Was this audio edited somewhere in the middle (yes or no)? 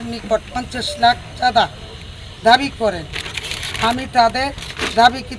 no